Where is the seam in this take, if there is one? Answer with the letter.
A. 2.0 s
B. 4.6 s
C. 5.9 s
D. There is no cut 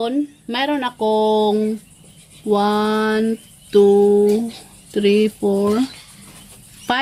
D